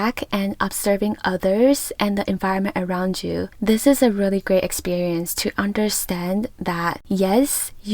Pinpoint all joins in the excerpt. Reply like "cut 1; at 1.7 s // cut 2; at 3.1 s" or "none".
cut 1; at 3.5 s